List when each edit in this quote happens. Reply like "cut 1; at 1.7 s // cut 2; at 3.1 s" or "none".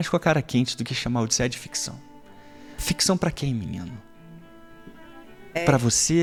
none